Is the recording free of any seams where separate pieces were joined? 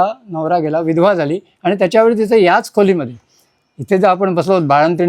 yes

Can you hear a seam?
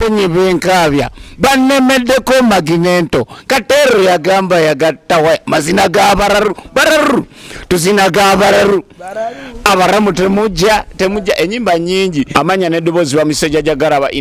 yes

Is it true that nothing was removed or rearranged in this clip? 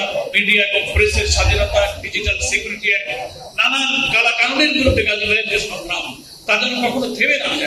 yes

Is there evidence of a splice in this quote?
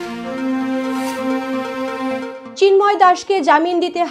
yes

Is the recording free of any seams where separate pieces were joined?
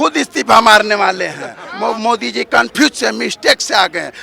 no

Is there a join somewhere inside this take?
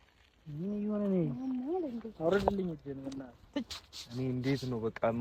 no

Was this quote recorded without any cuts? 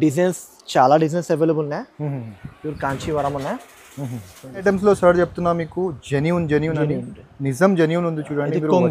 no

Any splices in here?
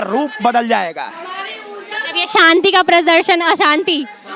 no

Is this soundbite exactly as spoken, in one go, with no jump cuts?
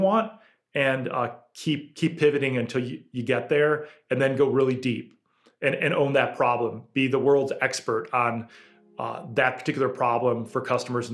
yes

